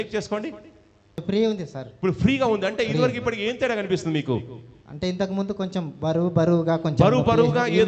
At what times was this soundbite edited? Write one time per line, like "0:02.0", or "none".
0:01.2